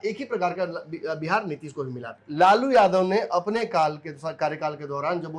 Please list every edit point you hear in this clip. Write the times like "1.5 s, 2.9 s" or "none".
2.2 s